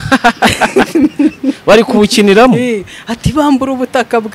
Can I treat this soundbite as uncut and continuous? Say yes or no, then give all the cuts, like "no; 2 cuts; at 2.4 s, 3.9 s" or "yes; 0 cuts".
yes; 0 cuts